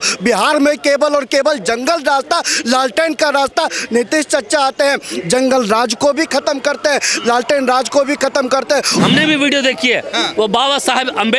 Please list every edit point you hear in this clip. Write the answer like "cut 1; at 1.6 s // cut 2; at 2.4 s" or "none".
cut 1; at 9.0 s